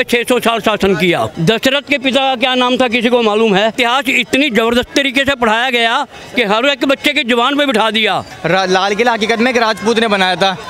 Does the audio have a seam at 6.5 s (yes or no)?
no